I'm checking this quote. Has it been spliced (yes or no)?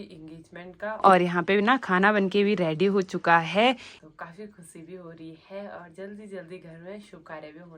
yes